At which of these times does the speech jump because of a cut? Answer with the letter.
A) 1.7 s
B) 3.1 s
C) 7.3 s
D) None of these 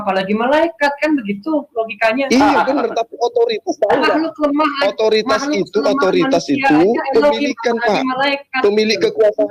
D